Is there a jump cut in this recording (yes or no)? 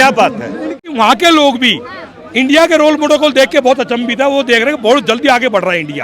yes